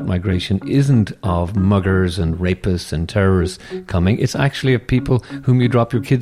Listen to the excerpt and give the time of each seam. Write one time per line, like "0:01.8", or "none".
none